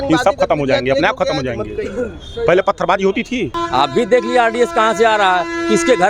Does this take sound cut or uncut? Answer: cut